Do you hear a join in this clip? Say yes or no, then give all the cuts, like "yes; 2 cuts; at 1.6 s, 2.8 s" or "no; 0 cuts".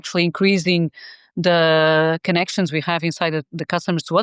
no; 0 cuts